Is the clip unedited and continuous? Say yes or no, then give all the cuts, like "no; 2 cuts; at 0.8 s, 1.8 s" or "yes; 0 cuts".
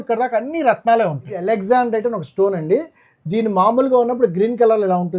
no; 1 cut; at 1.3 s